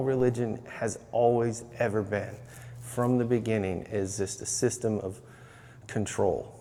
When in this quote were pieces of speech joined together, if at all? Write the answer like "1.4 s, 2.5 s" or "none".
none